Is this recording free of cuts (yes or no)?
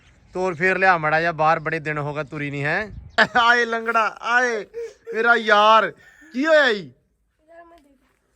no